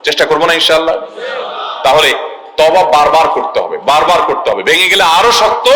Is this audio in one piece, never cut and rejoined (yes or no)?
yes